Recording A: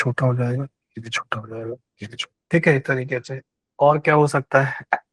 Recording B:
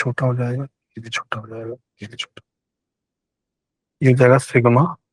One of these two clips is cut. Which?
A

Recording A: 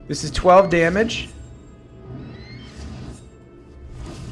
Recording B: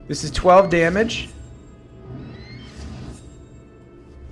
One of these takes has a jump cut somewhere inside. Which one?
A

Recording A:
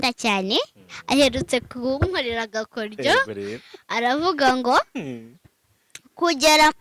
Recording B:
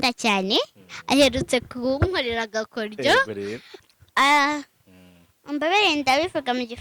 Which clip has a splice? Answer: B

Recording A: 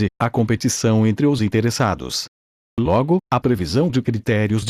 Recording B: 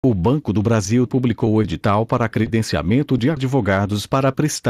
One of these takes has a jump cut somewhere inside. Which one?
B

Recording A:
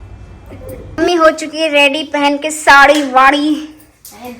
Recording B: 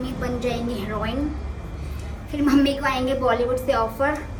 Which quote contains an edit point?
A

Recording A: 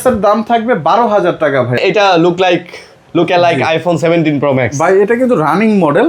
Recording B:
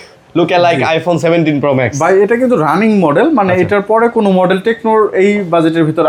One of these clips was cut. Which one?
A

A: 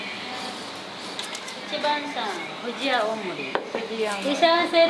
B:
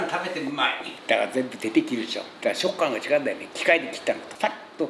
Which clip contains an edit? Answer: A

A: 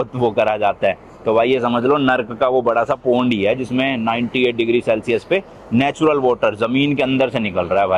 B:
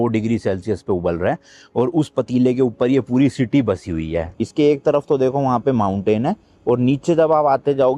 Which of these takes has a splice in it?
B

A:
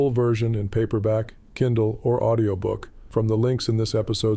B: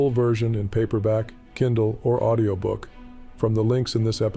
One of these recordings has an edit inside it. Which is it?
A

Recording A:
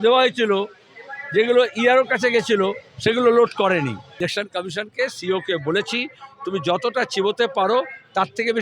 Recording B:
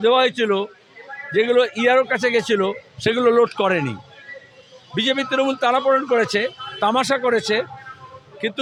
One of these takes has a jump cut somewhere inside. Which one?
A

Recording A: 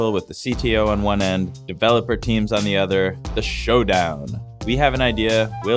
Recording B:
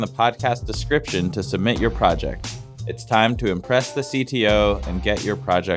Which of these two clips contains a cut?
A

